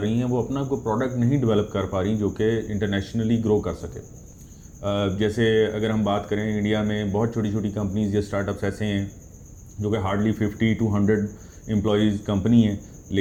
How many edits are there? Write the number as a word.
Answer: zero